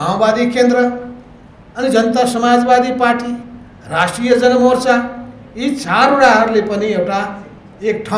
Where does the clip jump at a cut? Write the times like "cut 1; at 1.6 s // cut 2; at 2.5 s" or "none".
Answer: none